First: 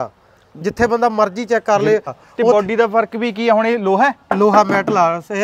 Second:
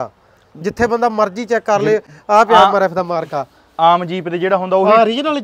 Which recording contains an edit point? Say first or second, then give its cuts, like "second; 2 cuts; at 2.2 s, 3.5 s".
first; 1 cut; at 2.2 s